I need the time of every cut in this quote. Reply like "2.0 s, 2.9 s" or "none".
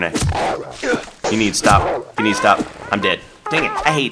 1.2 s